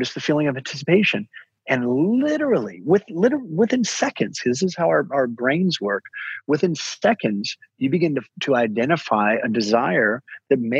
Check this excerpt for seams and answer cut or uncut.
uncut